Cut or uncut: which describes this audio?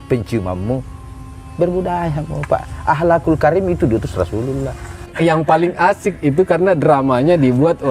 cut